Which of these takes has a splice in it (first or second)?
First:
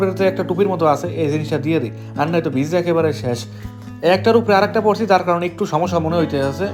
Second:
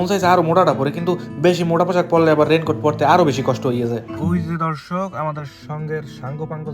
second